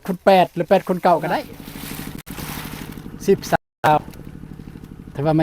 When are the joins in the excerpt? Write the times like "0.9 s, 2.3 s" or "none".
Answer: 1.6 s